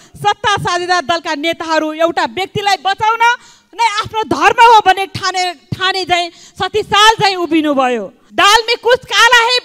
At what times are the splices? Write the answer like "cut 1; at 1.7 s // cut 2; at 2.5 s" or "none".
cut 1; at 8.2 s